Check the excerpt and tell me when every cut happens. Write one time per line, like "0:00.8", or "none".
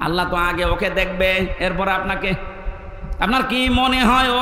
none